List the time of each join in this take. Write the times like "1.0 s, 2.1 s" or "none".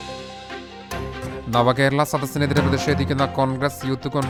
none